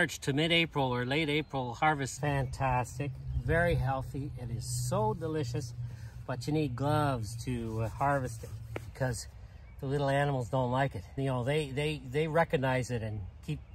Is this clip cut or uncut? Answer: cut